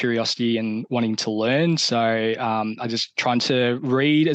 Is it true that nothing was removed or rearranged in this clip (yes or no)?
yes